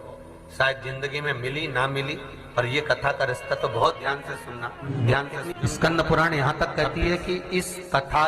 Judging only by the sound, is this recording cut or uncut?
cut